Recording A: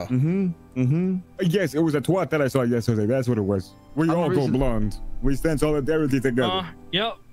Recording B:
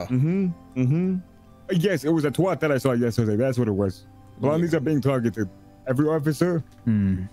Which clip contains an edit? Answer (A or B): A